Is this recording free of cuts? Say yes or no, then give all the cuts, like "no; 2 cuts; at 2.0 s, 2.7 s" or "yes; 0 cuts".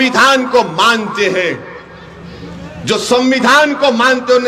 yes; 0 cuts